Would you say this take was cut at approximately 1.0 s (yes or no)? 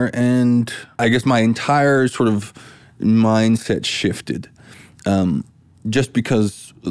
yes